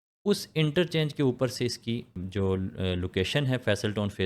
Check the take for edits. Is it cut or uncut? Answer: cut